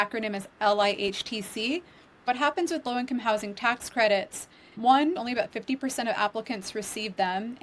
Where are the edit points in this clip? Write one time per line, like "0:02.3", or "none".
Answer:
0:02.3
0:05.2